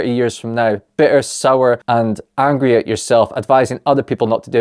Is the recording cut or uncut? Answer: cut